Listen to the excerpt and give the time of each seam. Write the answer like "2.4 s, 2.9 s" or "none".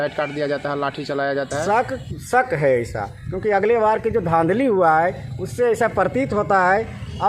1.6 s

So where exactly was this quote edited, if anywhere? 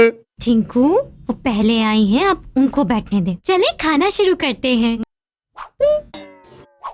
5.0 s

